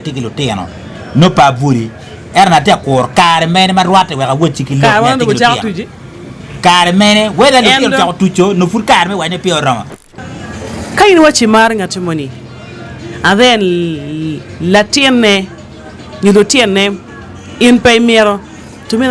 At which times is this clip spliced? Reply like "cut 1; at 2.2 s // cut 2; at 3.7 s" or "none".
cut 1; at 10.0 s